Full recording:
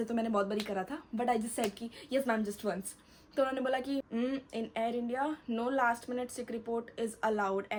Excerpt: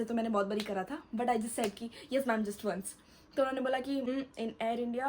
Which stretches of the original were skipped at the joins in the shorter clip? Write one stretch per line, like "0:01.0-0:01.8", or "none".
0:04.1-0:04.2